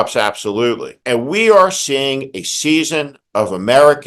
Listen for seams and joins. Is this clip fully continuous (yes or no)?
no